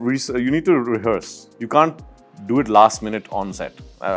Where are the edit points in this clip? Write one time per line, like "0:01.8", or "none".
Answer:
none